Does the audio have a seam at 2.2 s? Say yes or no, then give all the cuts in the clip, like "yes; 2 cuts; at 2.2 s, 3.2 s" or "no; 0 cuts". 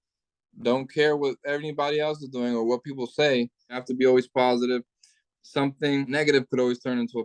no; 2 cuts; at 3.9 s, 6.1 s